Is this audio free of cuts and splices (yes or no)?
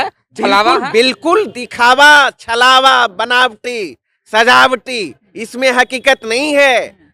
yes